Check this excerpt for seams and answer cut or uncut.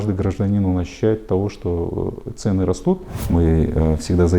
cut